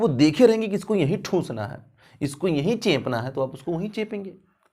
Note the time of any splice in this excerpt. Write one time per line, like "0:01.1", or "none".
none